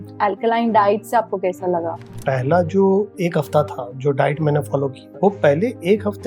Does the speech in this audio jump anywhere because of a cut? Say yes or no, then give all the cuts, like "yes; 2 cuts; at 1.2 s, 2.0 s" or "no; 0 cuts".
yes; 2 cuts; at 2.1 s, 5.0 s